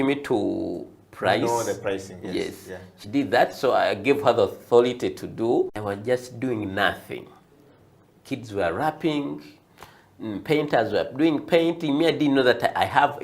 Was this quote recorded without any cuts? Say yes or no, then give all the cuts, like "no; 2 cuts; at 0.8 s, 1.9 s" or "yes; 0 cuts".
no; 1 cut; at 5.8 s